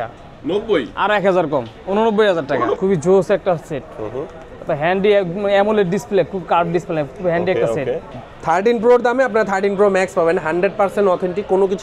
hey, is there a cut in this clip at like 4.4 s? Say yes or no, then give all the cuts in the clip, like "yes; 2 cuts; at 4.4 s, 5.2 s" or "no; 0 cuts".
no; 2 cuts; at 2.8 s, 8.1 s